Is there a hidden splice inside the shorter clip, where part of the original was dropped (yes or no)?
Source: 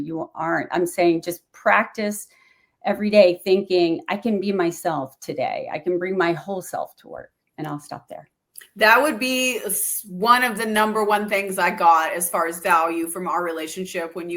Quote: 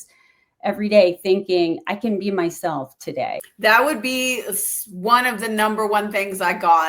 yes